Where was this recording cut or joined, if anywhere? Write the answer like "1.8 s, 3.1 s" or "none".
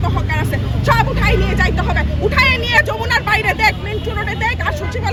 none